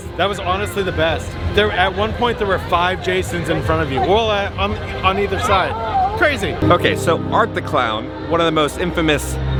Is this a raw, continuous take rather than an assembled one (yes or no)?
yes